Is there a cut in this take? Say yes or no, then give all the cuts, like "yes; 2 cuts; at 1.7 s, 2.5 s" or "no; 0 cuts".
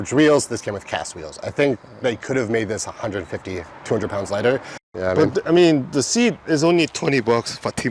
yes; 1 cut; at 4.8 s